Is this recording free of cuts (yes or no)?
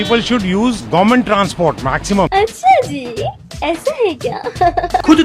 no